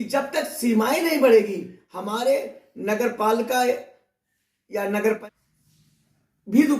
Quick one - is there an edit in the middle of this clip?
yes; 1 cut; at 5.2 s

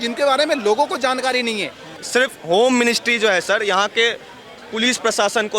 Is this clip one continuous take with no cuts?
no; 1 cut; at 1.9 s

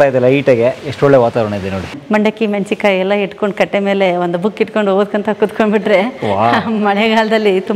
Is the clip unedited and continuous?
no; 1 cut; at 1.9 s

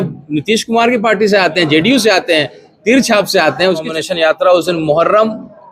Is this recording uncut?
no; 1 cut; at 3.9 s

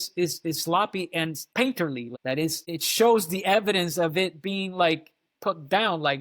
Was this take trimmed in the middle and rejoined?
yes; 2 cuts; at 1.4 s, 2.2 s

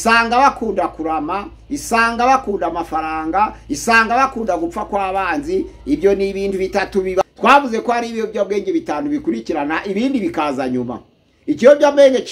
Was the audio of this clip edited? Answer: yes; 1 cut; at 7.2 s

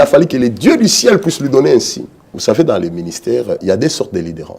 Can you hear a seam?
yes; 2 cuts; at 2.3 s, 3.6 s

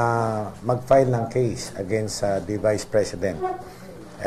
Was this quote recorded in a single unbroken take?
yes; 0 cuts

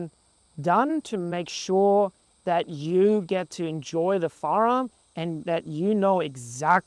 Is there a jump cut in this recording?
yes; 1 cut; at 1.0 s

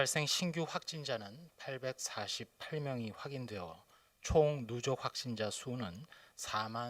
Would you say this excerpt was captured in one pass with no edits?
no; 1 cut; at 2.2 s

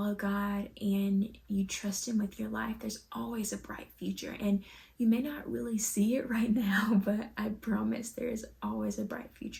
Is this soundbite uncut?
yes; 0 cuts

